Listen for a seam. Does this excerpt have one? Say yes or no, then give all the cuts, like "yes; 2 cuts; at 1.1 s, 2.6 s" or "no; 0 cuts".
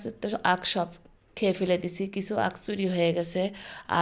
no; 0 cuts